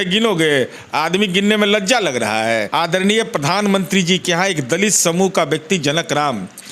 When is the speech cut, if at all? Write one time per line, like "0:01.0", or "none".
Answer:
0:02.7